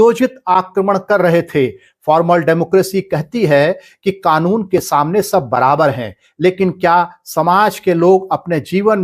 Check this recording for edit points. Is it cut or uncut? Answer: uncut